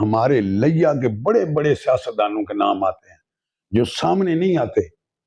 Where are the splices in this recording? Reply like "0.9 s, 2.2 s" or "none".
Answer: none